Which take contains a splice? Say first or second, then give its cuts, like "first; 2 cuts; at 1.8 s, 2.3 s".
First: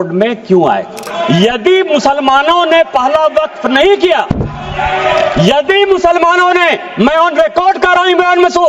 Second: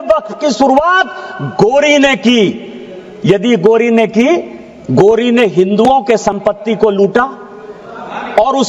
first; 1 cut; at 1.0 s